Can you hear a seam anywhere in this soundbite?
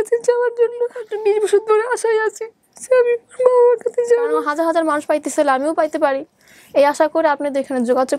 yes; 2 cuts; at 1.0 s, 4.5 s

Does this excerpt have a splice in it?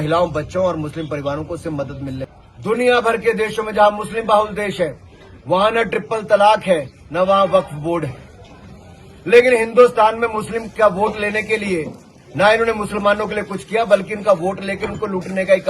yes; 1 cut; at 2.3 s

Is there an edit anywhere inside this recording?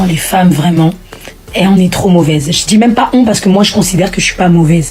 no; 0 cuts

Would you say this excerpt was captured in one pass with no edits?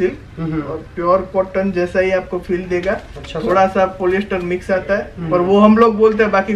yes; 0 cuts

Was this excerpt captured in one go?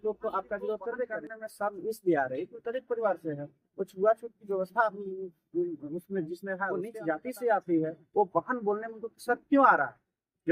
no; 2 cuts; at 1.4 s, 6.9 s

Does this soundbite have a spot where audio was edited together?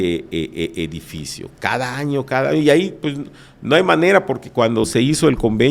no; 0 cuts

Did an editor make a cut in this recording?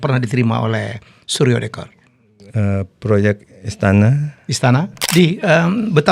yes; 1 cut; at 5.0 s

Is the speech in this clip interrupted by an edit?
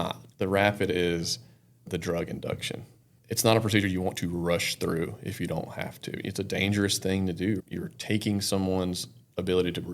yes; 1 cut; at 7.6 s

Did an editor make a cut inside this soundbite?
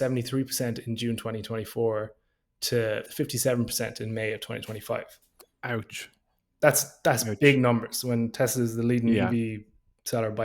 yes; 1 cut; at 3.0 s

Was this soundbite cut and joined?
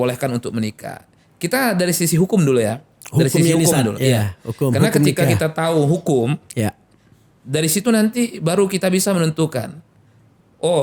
no; 0 cuts

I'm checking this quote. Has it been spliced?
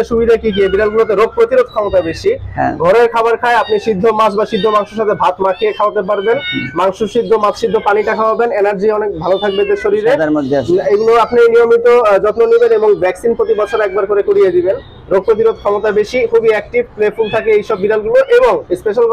no; 0 cuts

